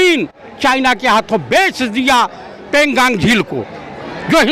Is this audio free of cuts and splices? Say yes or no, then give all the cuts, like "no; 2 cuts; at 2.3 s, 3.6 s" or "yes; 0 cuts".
yes; 0 cuts